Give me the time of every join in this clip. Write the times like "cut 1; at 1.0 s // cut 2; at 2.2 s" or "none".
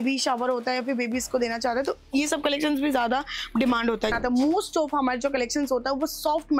cut 1; at 4.1 s